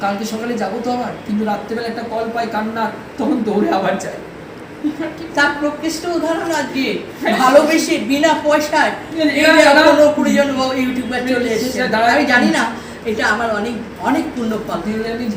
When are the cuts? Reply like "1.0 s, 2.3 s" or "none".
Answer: none